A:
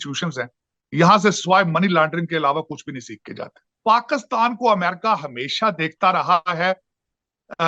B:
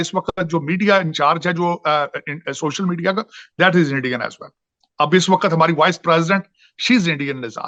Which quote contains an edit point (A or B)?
A